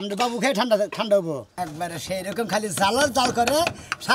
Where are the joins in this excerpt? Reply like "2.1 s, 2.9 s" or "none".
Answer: 1.5 s